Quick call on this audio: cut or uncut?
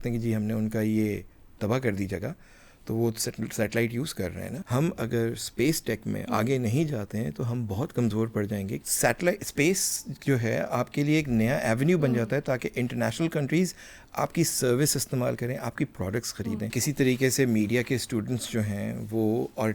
cut